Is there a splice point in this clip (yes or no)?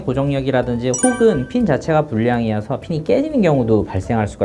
no